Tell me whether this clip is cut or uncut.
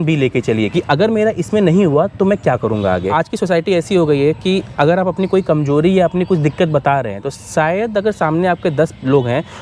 cut